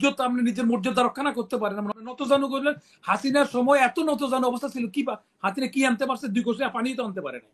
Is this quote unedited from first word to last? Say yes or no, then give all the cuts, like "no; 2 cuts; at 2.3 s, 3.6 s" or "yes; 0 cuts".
no; 1 cut; at 2.0 s